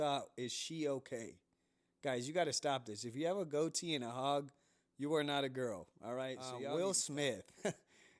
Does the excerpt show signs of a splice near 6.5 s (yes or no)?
yes